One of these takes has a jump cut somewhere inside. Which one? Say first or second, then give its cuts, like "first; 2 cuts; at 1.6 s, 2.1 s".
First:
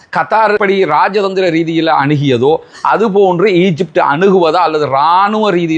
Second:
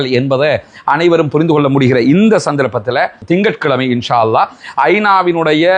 second; 1 cut; at 3.2 s